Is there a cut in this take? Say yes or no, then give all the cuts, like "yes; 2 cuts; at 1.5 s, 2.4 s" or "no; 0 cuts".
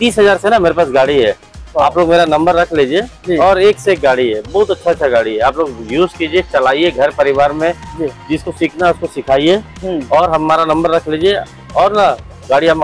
no; 0 cuts